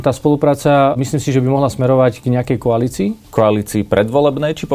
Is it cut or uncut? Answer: cut